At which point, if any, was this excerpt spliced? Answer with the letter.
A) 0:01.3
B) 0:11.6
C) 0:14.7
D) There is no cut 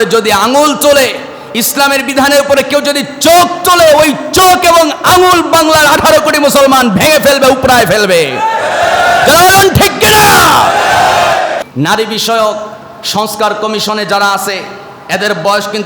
B